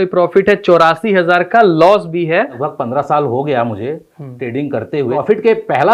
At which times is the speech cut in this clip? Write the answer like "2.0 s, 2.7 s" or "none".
2.6 s, 5.1 s